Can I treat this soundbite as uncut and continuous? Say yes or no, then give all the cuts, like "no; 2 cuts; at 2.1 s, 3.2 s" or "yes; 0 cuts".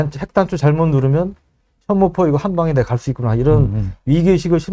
yes; 0 cuts